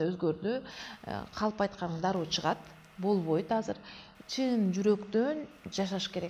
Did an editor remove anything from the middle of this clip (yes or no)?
no